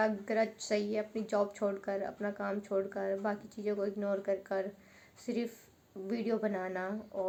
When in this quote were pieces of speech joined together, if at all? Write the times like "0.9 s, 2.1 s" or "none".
none